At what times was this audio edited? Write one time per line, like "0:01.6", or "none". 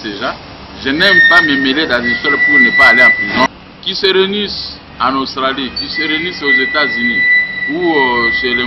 0:03.5

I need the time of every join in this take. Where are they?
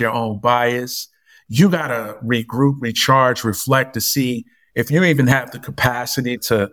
none

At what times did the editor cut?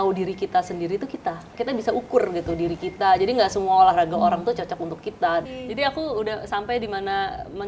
0:01.5
0:05.4

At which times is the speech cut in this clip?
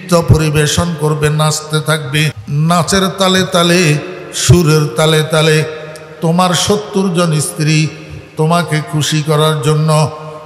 0:02.4

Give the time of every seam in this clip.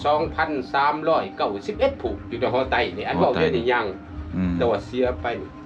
none

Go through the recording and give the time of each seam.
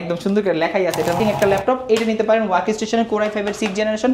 0:01.2

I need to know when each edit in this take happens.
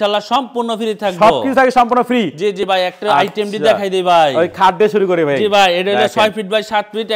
none

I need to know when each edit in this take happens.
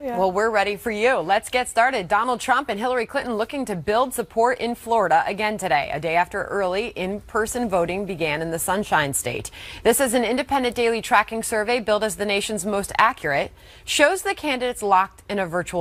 none

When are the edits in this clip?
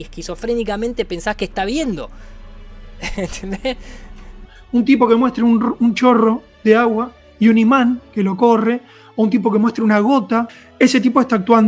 0:04.5
0:10.5

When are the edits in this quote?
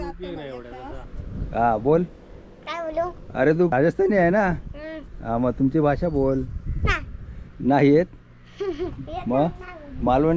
0:01.0
0:03.7

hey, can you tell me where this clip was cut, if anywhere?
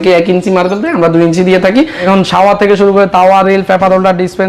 0:02.0

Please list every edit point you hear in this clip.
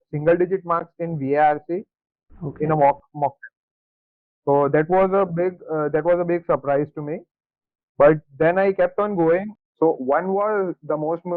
0:09.5

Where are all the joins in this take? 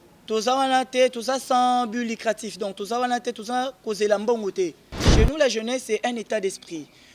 0:05.0

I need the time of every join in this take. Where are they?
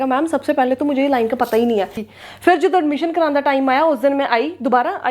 0:02.0

